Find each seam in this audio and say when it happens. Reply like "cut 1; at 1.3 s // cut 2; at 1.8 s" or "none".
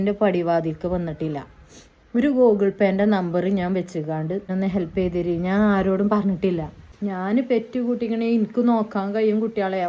cut 1; at 4.5 s // cut 2; at 6.9 s